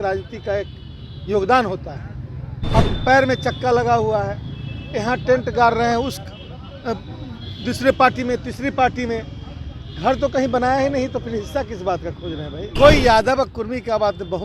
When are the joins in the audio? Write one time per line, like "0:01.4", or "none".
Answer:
0:12.7